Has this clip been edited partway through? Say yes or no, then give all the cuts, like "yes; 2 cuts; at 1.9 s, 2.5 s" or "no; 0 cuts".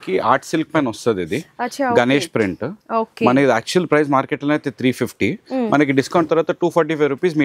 no; 0 cuts